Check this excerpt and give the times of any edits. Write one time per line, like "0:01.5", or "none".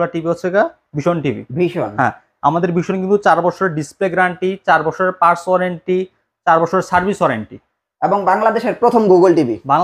none

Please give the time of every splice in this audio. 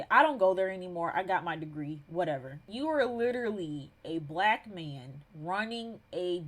0:02.6

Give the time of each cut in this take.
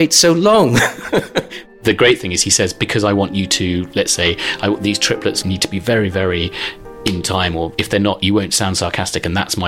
0:01.7
0:05.4
0:07.7

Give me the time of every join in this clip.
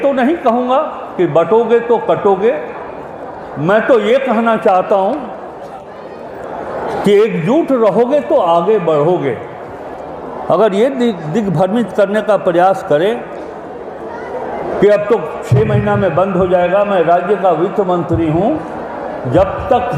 none

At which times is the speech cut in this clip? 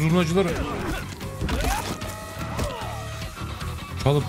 none

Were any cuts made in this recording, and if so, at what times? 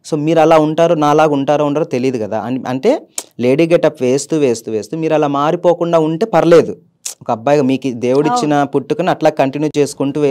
none

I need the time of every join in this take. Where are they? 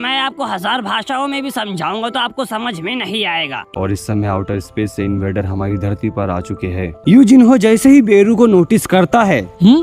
0:03.7
0:07.0

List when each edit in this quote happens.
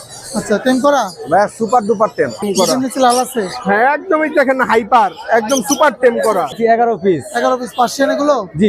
0:02.4
0:06.6

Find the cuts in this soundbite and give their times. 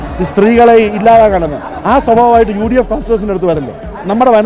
none

